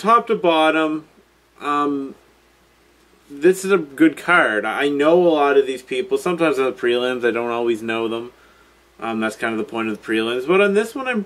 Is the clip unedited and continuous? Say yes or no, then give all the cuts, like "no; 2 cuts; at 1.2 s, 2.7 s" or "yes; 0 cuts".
no; 1 cut; at 5.5 s